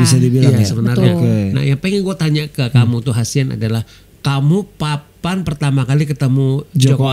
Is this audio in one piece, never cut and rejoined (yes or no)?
yes